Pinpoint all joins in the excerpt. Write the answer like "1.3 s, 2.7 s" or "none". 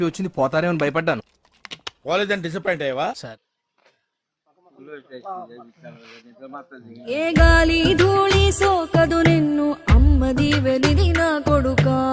3.2 s